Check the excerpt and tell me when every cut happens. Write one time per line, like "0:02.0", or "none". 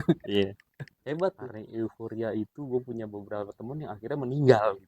0:02.0